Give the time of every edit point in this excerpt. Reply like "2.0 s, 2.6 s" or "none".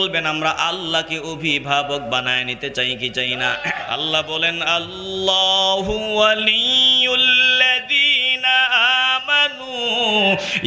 3.8 s